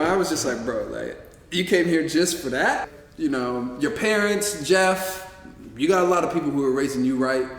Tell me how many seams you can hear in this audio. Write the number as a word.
one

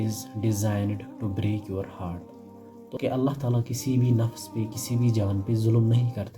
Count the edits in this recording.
one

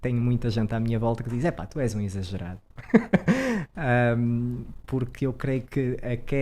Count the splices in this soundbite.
zero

